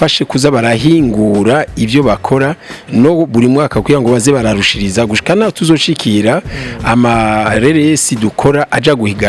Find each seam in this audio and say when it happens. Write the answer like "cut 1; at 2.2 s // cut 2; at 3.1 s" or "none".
none